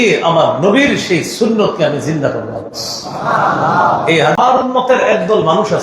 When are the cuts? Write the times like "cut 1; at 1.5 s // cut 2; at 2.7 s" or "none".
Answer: cut 1; at 4.4 s

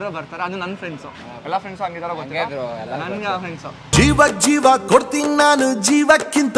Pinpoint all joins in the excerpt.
none

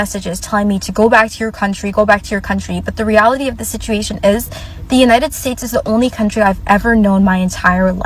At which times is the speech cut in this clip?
none

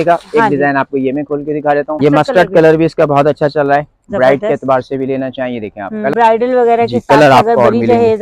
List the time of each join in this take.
cut 1; at 2.0 s // cut 2; at 6.1 s

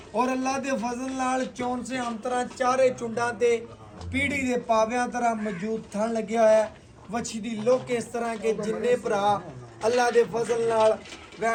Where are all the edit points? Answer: none

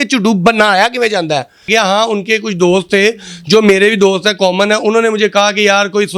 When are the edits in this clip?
cut 1; at 1.7 s

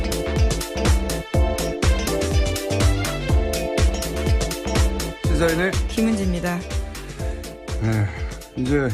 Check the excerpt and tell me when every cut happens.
none

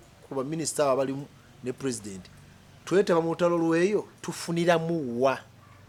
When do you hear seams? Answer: none

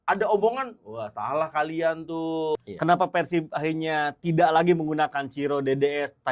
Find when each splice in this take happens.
cut 1; at 2.5 s

